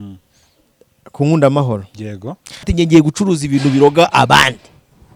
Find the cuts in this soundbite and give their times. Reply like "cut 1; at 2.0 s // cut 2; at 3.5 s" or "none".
cut 1; at 2.7 s